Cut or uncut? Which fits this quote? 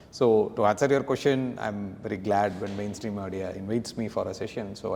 uncut